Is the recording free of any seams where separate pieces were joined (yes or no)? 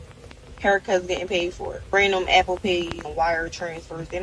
no